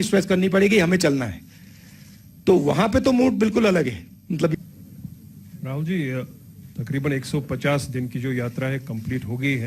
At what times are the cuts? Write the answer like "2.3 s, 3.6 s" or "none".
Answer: 4.5 s

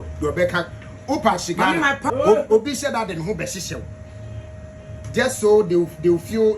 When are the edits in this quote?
2.0 s

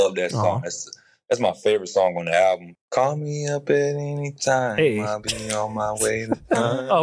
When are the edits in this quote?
2.7 s

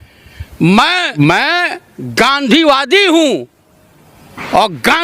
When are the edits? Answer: 1.1 s

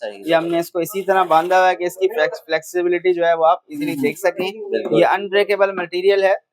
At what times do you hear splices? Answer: none

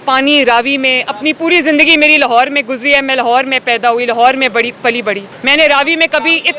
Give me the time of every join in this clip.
5.3 s

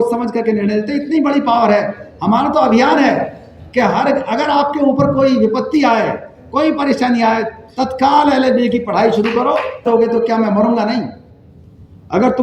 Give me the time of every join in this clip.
9.8 s

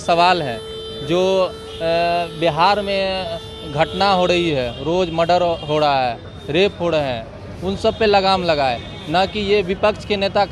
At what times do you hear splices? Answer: none

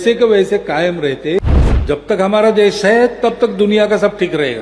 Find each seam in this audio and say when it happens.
1.4 s

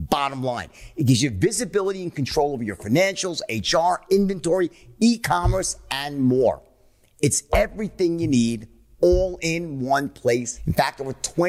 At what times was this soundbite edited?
10.6 s

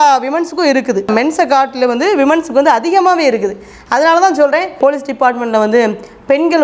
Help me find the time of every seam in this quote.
1.1 s, 4.8 s

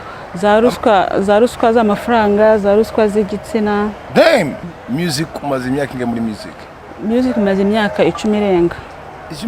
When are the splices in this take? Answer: 4.6 s

